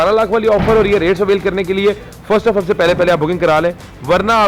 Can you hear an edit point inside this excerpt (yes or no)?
no